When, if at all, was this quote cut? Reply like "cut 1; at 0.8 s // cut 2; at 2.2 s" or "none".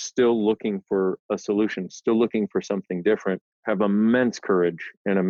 none

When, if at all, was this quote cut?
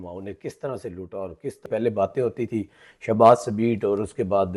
cut 1; at 1.7 s

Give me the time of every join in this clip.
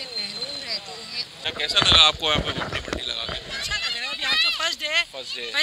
cut 1; at 1.5 s

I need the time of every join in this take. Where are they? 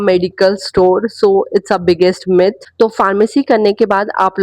cut 1; at 2.6 s

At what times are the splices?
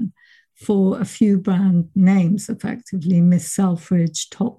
none

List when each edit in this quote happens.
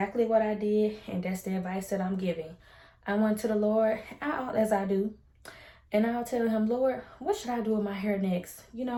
none

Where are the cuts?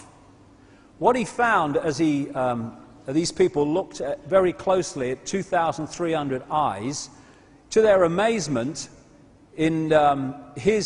none

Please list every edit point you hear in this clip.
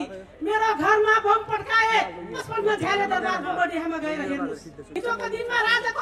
none

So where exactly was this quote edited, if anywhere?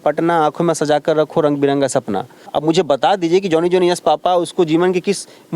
cut 1; at 2.5 s

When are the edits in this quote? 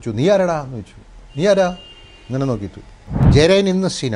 cut 1; at 3.2 s

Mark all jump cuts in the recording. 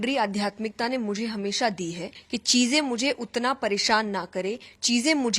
cut 1; at 2.1 s

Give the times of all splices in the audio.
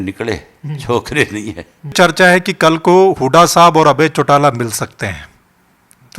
cut 1; at 1.9 s

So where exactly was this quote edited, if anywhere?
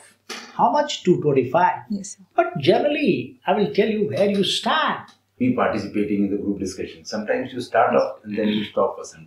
cut 1; at 5.3 s

